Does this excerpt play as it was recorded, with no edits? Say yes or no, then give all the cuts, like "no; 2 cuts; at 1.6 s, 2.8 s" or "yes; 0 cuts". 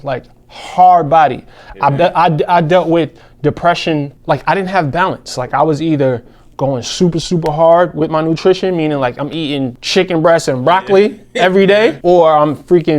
no; 3 cuts; at 4.1 s, 9.8 s, 12.0 s